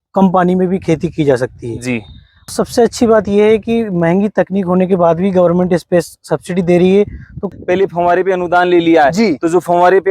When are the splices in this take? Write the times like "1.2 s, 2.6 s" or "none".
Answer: 2.5 s, 7.5 s